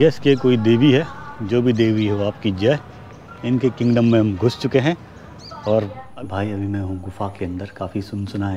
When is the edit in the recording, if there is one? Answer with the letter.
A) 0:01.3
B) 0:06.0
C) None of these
B